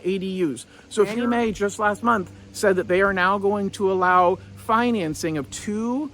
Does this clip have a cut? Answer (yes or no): yes